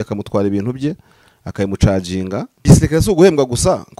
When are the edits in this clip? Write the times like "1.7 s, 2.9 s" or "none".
2.6 s